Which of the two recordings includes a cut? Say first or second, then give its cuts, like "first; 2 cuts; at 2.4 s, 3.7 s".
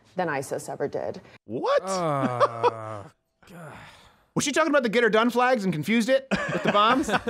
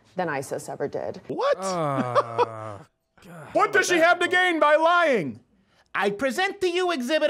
second; 2 cuts; at 1.2 s, 3.5 s